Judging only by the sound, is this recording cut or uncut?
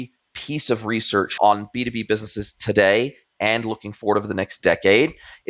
cut